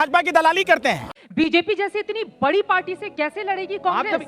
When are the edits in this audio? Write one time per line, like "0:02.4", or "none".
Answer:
0:01.1